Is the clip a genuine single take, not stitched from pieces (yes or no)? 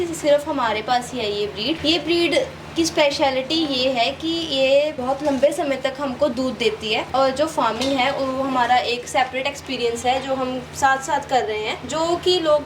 no